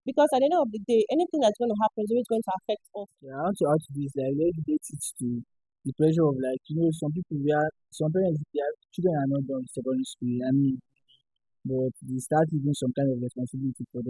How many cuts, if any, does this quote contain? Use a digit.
1